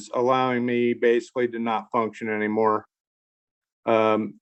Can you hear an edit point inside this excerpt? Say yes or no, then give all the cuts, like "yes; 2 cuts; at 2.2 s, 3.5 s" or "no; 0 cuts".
no; 0 cuts